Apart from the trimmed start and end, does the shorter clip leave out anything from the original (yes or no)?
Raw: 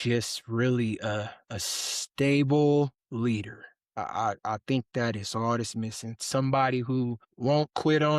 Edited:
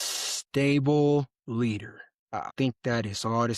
yes